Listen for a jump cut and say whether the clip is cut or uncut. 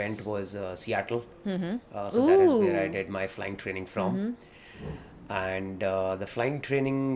uncut